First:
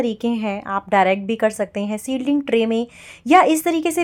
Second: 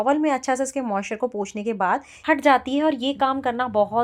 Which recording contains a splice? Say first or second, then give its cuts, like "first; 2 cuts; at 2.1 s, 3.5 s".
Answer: second; 1 cut; at 1.6 s